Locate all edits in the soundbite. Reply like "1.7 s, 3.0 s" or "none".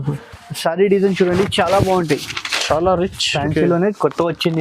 3.2 s